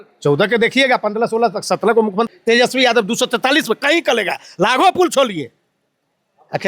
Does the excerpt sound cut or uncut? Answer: cut